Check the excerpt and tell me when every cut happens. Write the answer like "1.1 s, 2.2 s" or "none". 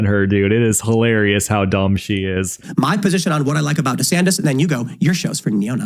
2.6 s